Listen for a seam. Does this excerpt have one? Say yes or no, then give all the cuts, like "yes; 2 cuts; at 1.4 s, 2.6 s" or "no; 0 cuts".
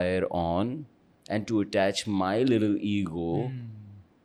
no; 0 cuts